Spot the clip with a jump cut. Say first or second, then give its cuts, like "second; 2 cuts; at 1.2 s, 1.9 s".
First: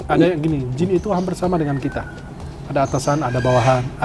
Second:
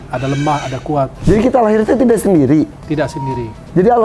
second; 2 cuts; at 1.2 s, 2.8 s